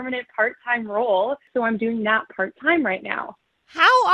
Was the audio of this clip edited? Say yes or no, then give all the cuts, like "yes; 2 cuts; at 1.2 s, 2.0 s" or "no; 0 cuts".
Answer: yes; 1 cut; at 1.5 s